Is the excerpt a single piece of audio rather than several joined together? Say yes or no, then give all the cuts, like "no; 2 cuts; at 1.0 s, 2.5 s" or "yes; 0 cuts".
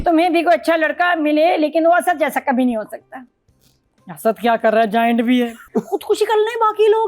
no; 1 cut; at 5.6 s